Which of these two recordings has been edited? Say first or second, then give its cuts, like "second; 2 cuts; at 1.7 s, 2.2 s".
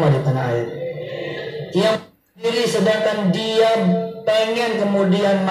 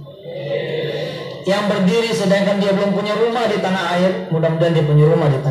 first; 1 cut; at 2.5 s